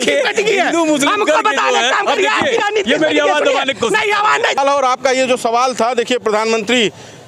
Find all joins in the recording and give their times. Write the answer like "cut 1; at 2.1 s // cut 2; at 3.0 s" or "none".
cut 1; at 4.6 s